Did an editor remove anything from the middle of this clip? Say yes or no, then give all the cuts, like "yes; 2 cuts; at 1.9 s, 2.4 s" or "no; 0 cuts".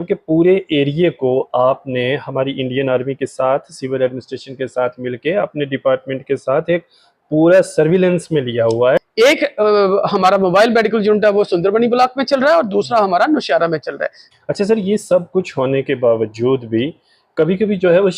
yes; 2 cuts; at 9.0 s, 14.1 s